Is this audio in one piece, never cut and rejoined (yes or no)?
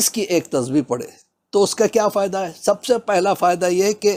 yes